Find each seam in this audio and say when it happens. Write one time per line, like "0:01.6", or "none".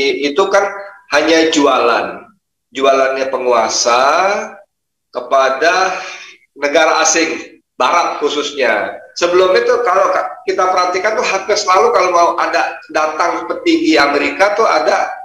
0:09.0